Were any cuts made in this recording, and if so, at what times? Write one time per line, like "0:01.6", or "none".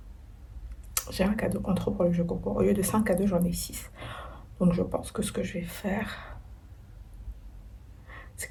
none